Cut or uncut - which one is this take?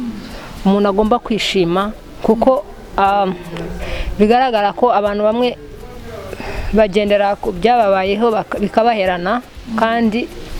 uncut